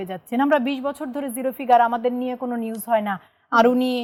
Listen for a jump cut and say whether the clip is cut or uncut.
uncut